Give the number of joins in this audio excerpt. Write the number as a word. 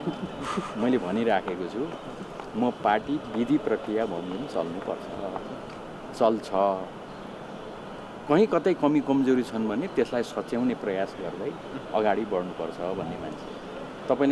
zero